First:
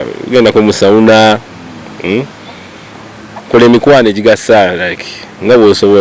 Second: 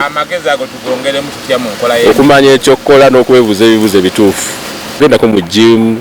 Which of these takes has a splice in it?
second; 1 cut; at 5.0 s

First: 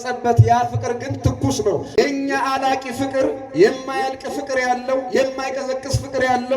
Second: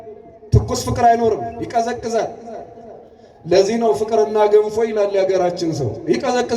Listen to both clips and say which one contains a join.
first; 1 cut; at 1.9 s

